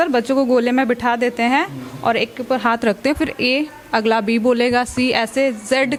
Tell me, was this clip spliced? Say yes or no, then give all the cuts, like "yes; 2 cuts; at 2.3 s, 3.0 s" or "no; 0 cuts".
no; 0 cuts